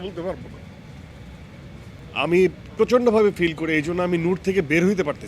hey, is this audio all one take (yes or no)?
no